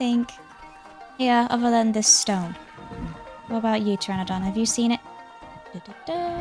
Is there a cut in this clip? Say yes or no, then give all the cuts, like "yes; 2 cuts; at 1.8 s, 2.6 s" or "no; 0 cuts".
no; 0 cuts